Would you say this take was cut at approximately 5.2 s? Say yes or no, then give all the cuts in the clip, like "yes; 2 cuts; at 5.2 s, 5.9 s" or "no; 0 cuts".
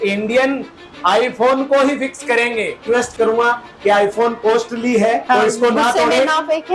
yes; 2 cuts; at 2.8 s, 5.2 s